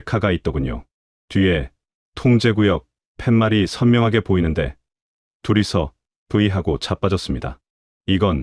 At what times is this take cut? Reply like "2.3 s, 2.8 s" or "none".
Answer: none